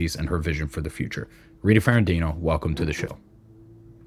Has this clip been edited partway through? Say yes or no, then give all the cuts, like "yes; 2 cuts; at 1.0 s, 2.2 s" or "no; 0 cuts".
no; 0 cuts